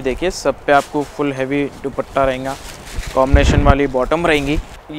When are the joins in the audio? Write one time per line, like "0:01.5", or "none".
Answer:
none